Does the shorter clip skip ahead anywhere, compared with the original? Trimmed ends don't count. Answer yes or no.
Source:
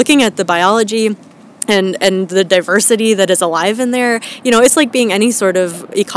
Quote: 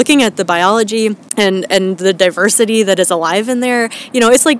yes